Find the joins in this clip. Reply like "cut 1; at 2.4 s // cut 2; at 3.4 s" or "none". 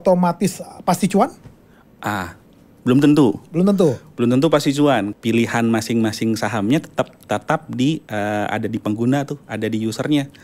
cut 1; at 5.1 s